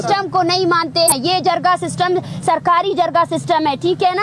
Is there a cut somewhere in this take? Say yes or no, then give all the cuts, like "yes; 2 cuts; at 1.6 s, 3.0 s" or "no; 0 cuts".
yes; 1 cut; at 1.1 s